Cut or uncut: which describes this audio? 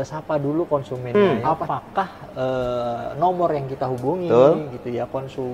cut